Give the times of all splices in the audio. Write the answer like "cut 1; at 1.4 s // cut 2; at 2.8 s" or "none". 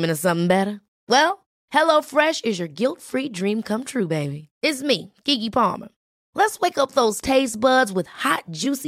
none